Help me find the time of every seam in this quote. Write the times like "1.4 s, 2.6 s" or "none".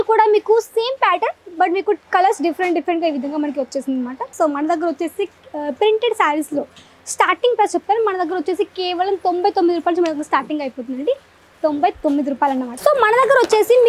4.3 s, 12.7 s